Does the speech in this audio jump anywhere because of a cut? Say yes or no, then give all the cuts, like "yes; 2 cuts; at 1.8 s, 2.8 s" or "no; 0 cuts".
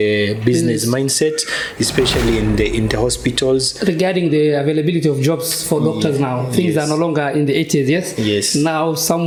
no; 0 cuts